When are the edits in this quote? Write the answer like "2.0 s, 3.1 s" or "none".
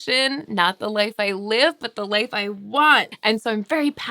3.1 s